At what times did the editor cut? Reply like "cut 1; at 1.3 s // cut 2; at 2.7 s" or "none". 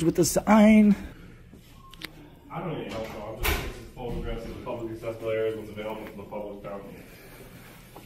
cut 1; at 1.1 s